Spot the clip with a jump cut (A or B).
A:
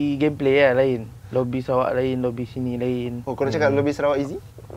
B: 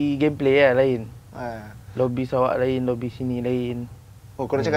A